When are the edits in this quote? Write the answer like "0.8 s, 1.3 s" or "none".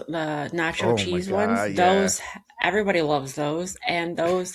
none

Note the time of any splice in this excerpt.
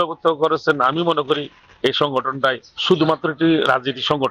2.7 s

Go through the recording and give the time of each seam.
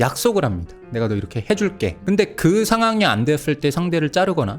2.0 s

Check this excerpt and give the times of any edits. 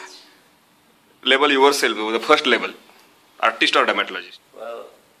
4.2 s

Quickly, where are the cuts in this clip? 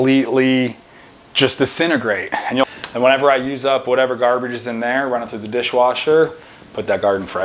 2.6 s

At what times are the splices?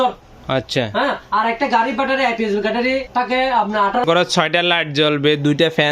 3.1 s, 4.0 s

